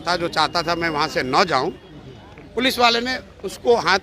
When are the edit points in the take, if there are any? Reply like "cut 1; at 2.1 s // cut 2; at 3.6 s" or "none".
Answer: none